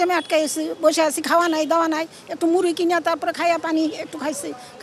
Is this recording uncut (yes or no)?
yes